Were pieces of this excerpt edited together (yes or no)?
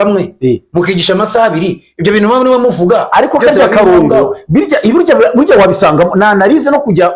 no